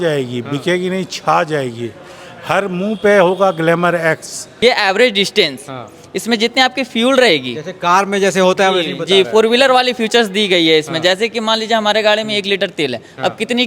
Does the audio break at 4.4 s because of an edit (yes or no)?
yes